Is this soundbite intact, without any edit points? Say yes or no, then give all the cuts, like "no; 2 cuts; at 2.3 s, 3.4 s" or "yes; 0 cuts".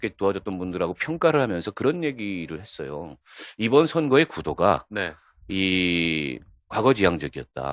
yes; 0 cuts